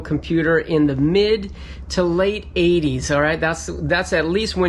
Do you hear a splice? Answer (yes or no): no